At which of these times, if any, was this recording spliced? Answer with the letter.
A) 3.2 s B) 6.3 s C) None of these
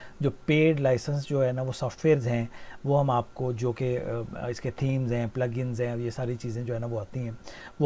C